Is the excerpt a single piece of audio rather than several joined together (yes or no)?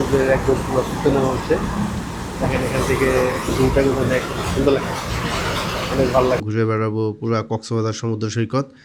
no